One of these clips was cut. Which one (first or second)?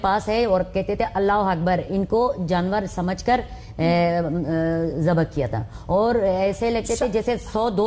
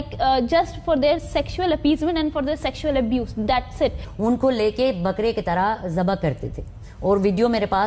second